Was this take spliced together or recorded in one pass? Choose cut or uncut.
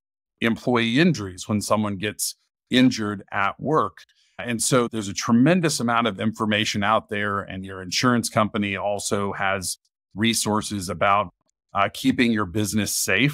uncut